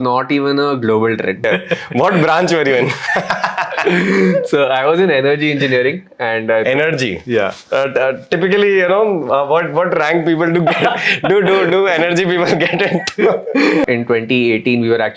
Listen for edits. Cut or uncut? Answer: cut